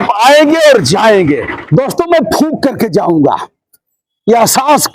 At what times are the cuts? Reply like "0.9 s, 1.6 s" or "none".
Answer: 1.5 s